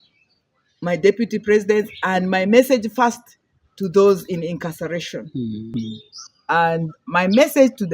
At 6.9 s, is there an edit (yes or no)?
no